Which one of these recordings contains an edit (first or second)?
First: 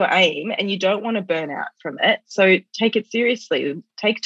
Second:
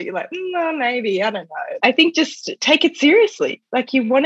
second